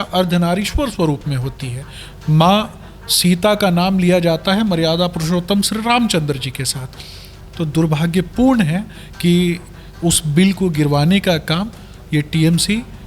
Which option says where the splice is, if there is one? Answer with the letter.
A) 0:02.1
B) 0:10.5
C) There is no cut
C